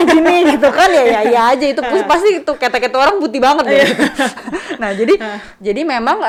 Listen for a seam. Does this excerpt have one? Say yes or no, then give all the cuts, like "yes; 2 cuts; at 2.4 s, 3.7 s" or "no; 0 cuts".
no; 0 cuts